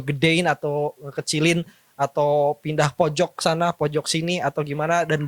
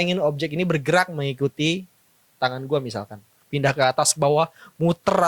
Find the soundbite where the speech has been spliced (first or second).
second